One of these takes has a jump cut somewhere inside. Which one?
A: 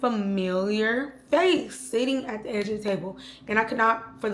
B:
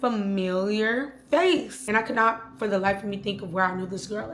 B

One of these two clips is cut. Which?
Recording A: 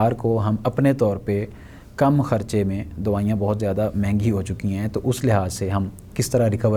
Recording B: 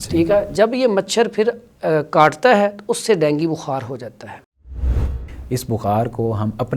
B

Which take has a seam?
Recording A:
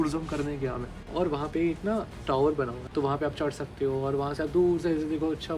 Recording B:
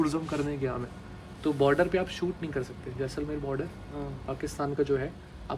A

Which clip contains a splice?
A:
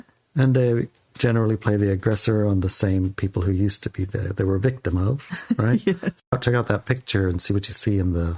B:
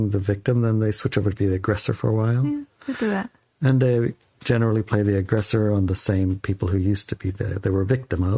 A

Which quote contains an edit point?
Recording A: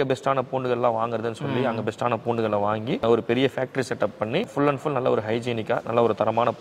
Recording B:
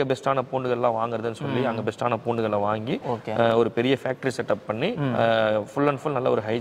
A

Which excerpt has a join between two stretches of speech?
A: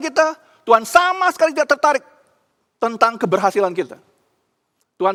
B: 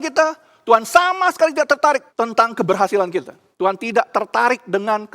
B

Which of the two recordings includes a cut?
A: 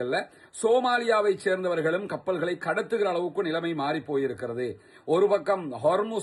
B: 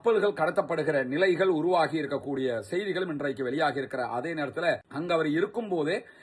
B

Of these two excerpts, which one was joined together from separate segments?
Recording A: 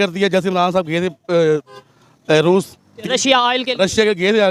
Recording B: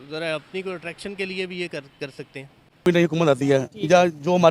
B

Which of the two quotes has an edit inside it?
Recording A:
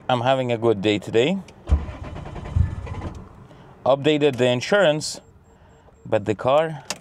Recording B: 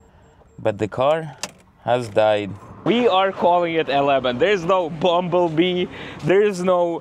B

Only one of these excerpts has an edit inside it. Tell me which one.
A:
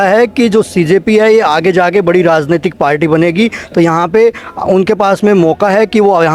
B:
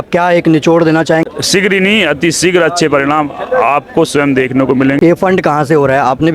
B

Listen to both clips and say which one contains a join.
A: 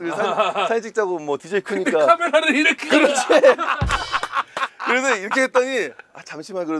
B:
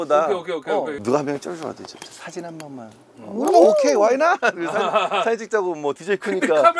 B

